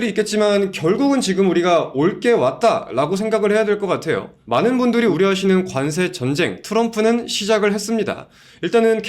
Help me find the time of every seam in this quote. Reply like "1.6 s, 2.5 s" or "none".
4.3 s, 5.1 s